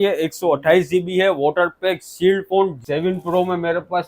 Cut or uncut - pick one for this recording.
cut